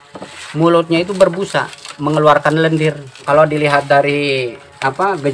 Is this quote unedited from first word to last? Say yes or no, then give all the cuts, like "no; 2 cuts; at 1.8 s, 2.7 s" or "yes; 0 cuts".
no; 1 cut; at 3.2 s